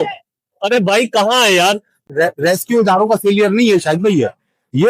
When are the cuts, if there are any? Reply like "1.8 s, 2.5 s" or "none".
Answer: 2.0 s